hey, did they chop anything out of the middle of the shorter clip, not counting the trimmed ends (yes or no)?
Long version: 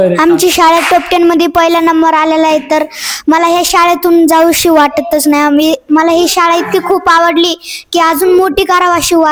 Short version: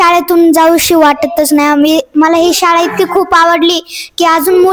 no